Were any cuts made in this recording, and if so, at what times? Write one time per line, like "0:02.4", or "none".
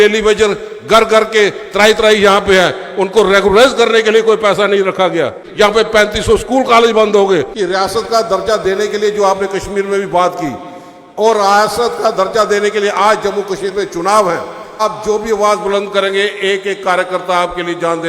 0:05.4
0:07.5
0:14.8

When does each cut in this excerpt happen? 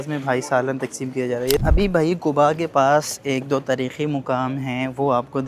0:01.6

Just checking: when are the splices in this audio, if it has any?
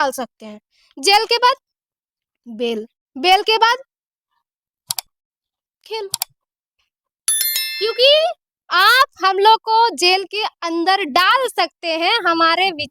none

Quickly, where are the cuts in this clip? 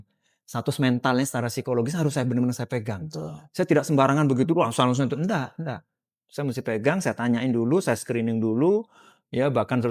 none

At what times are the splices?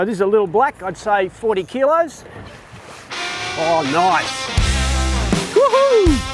none

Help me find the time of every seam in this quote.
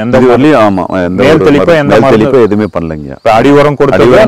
none

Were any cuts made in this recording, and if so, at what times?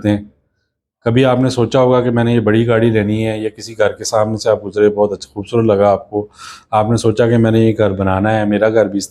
none

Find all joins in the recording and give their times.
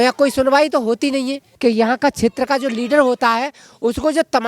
0:01.5

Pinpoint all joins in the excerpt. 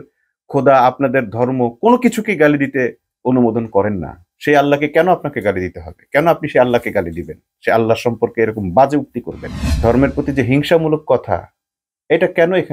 0:09.7

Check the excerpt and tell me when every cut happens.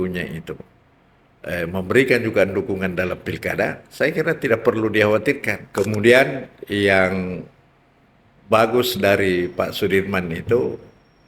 0:05.6

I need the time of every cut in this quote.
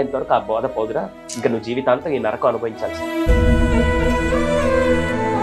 none

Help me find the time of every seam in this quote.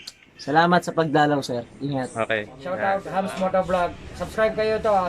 0:02.5

